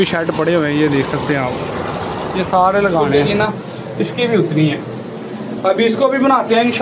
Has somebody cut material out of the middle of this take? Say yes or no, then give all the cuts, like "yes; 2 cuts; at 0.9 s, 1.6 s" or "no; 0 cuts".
yes; 1 cut; at 3.1 s